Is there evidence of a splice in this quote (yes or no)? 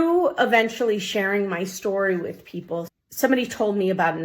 yes